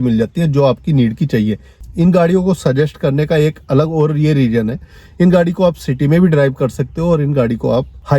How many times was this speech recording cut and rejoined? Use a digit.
1